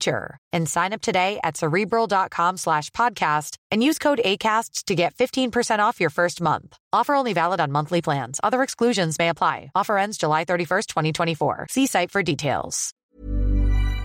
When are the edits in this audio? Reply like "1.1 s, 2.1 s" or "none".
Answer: 13.1 s